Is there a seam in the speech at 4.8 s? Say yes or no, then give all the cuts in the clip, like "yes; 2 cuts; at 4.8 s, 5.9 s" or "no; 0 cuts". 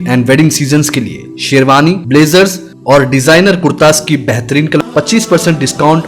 yes; 1 cut; at 4.8 s